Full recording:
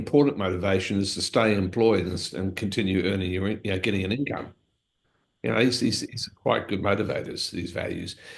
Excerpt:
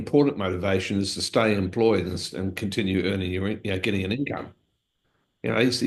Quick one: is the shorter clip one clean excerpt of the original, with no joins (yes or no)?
yes